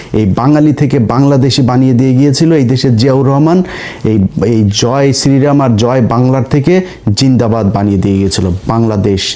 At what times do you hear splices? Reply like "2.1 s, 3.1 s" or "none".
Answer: none